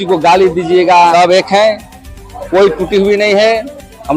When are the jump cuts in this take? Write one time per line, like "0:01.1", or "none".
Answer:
0:01.1